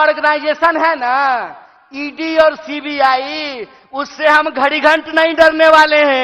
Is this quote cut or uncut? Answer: uncut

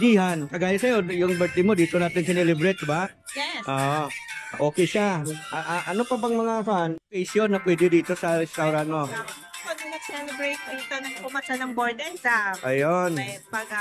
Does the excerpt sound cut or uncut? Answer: cut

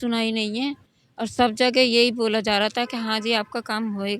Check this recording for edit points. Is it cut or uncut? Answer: uncut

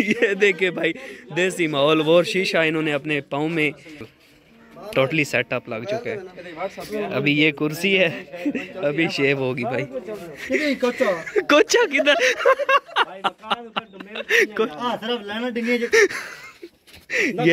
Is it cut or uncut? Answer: cut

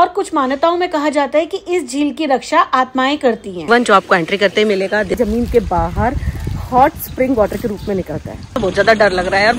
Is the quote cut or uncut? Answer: cut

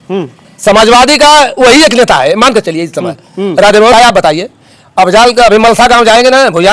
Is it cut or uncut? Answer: cut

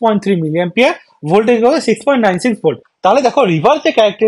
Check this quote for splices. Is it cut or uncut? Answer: cut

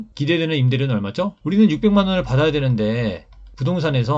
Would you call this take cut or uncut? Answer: cut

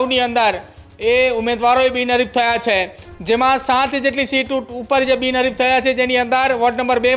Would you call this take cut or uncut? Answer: uncut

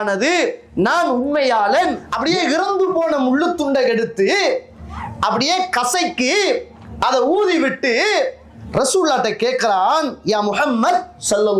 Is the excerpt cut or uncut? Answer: cut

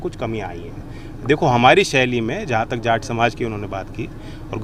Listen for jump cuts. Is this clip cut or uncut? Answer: uncut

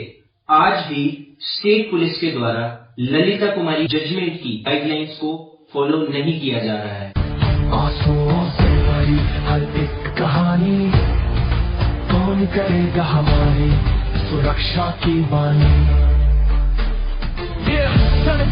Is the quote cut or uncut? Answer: cut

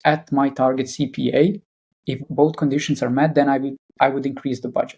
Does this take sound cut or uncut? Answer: cut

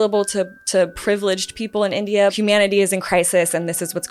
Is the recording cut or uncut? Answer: cut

